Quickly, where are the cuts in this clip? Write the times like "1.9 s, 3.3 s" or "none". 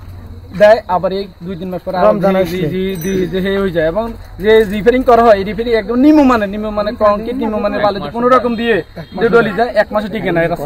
none